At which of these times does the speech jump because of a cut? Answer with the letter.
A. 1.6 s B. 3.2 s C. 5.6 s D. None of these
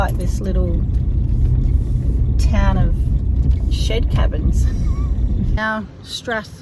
C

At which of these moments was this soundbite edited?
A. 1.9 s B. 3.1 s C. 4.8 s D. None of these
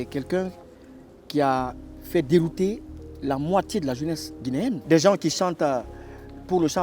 C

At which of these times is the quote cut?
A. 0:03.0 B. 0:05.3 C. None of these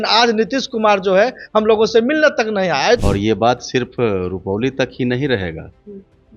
A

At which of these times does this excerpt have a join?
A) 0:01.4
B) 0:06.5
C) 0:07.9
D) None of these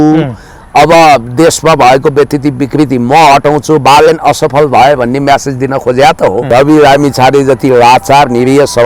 B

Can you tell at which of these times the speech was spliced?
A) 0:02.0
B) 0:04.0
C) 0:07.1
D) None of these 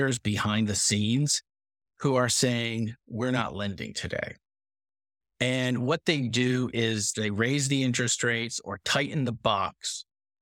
C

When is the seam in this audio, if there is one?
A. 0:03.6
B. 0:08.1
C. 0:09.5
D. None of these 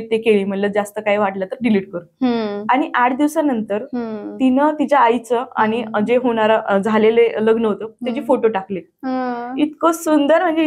D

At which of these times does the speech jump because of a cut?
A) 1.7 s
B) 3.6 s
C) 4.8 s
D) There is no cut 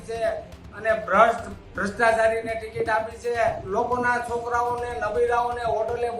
B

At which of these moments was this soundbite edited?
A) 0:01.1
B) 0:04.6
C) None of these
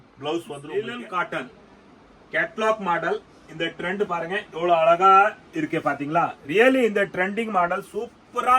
A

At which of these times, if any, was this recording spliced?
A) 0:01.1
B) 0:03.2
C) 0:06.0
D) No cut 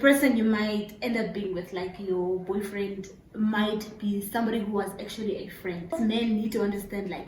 C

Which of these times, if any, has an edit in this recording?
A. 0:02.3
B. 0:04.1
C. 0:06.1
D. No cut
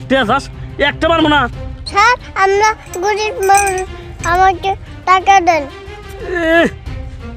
D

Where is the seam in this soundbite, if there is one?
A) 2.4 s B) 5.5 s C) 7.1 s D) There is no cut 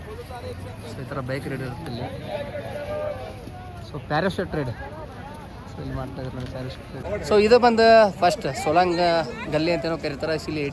C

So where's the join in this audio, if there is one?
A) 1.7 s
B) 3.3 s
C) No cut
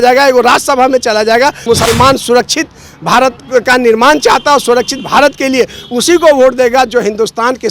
A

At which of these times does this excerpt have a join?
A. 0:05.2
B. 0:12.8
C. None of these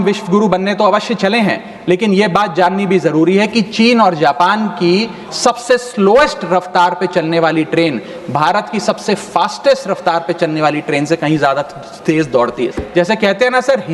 B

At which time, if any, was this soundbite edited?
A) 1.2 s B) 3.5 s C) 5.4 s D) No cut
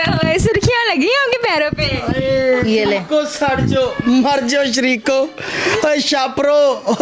D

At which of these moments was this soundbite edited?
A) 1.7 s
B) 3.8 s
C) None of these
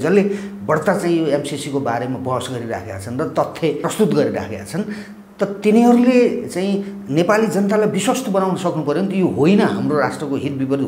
B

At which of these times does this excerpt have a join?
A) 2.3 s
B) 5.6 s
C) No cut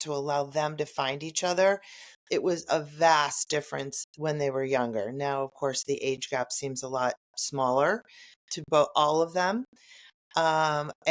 C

